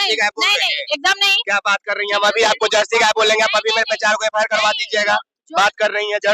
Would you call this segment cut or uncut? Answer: uncut